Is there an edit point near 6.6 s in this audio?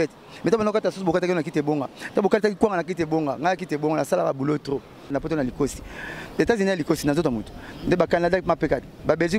no; 1 cut; at 5.1 s

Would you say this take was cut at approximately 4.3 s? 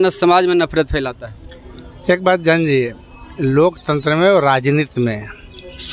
yes; 1 cut; at 4.3 s

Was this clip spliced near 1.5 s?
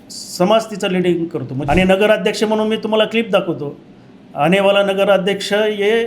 yes; 1 cut; at 1.5 s

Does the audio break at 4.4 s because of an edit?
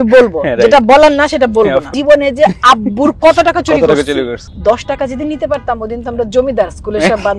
yes; 2 cuts; at 1.9 s, 4.4 s

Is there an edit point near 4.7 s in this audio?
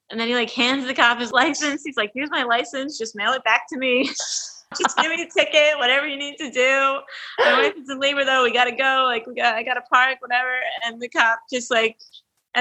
yes; 2 cuts; at 1.3 s, 4.7 s

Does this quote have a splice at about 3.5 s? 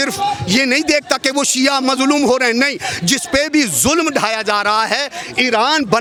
no; 0 cuts

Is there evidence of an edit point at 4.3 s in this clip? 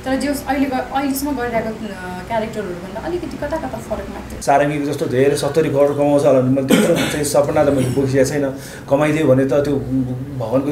yes; 1 cut; at 4.3 s

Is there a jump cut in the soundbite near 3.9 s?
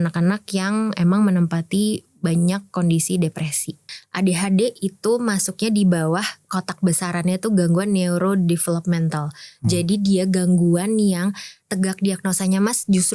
yes; 1 cut; at 3.9 s

